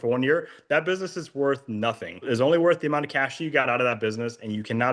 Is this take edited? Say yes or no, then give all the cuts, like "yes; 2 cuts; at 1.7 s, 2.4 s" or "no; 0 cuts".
yes; 1 cut; at 2.3 s